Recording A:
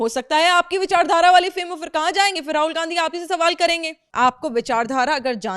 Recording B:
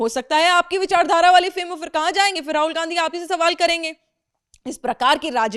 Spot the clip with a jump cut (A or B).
A